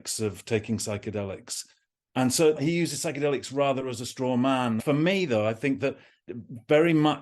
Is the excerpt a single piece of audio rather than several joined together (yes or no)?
no